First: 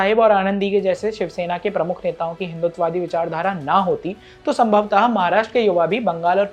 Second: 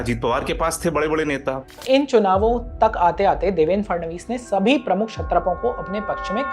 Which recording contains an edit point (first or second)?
second